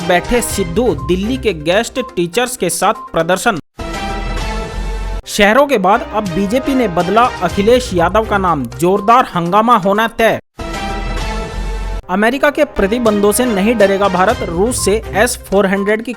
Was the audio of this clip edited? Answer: yes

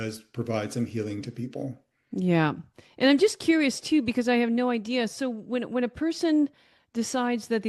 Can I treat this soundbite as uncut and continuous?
yes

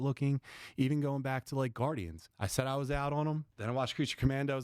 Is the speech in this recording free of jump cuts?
no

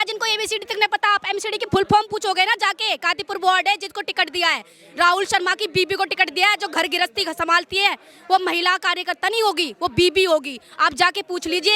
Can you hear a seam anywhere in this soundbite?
no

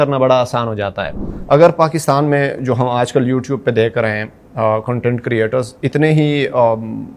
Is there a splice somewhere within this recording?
yes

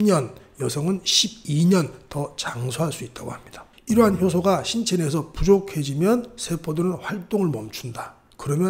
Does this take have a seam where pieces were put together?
yes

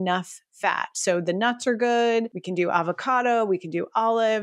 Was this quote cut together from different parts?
yes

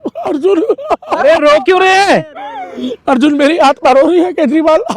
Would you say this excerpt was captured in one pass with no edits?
yes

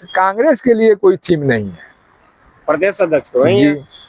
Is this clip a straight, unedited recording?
yes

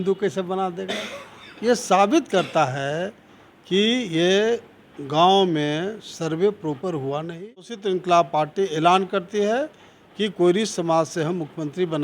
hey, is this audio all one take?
no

